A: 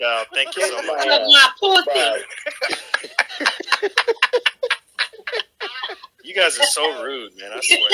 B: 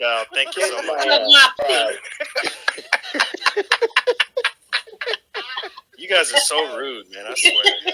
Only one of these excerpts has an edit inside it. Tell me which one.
B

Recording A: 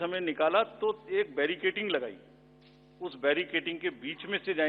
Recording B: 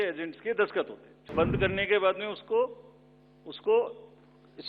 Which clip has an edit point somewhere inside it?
B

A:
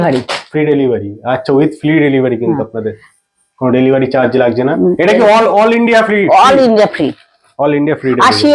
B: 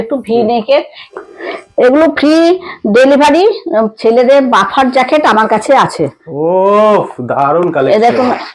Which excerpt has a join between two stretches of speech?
B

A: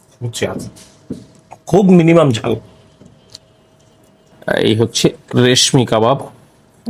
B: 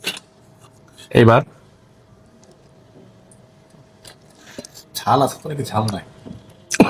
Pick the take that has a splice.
A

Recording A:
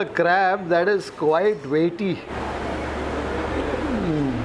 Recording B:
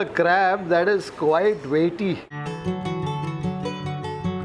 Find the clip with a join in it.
A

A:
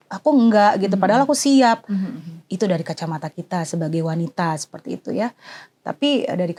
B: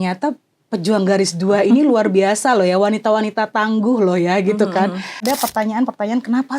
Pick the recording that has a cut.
B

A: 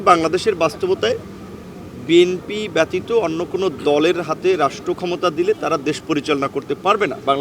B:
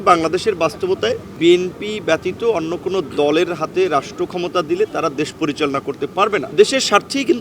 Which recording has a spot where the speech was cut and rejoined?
B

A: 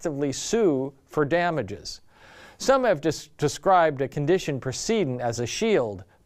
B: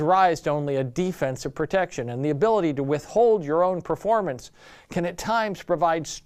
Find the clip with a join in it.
B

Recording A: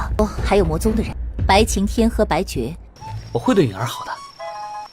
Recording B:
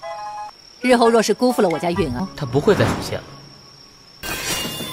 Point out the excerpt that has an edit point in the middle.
A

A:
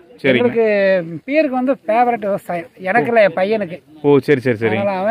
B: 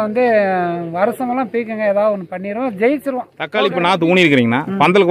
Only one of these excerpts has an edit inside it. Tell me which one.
B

